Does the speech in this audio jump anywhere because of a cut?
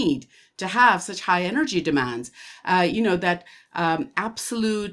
no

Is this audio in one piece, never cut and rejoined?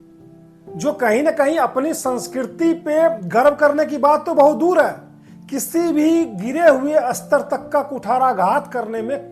yes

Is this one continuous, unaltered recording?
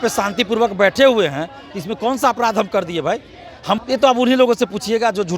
no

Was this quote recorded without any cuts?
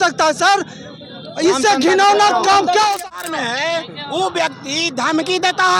no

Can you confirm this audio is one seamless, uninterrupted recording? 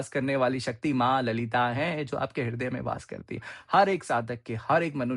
yes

